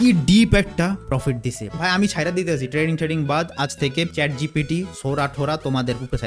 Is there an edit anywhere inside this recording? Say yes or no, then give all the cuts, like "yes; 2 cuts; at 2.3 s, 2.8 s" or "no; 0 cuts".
yes; 2 cuts; at 1.6 s, 4.1 s